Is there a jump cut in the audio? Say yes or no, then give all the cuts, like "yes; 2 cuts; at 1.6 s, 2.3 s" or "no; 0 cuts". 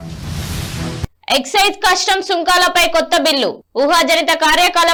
no; 0 cuts